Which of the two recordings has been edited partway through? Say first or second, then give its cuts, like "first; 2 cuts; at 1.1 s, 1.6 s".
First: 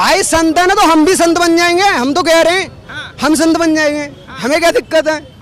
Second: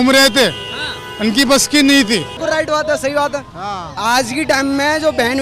second; 1 cut; at 2.3 s